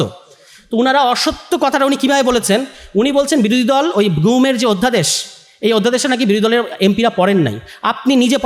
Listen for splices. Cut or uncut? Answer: uncut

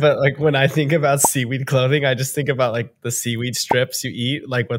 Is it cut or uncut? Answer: uncut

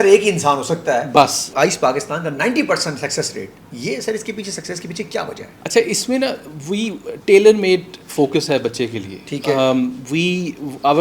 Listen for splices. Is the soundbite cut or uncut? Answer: cut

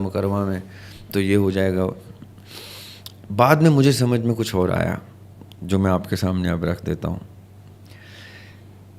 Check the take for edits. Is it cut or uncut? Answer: uncut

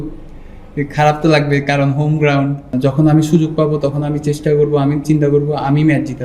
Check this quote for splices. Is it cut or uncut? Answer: cut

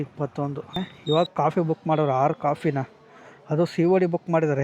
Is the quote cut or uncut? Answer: cut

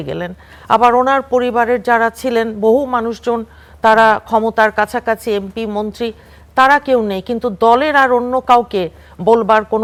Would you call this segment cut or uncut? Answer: uncut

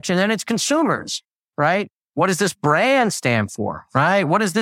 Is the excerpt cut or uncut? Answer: uncut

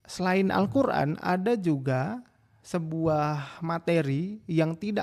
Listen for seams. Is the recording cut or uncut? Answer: uncut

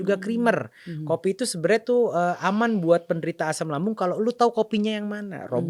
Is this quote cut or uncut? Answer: uncut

